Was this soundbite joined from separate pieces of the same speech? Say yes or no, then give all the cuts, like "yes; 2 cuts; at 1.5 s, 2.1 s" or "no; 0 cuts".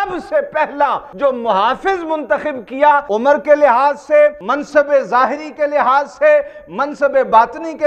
yes; 3 cuts; at 1.1 s, 3.1 s, 4.5 s